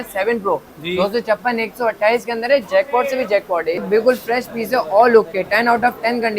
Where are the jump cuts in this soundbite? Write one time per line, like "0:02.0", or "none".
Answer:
0:03.8